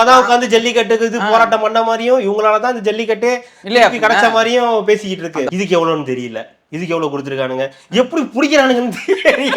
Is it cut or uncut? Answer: cut